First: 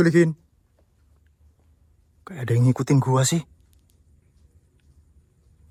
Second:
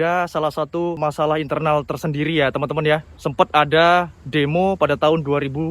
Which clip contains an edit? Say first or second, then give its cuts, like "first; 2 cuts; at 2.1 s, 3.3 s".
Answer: second; 2 cuts; at 1.0 s, 3.2 s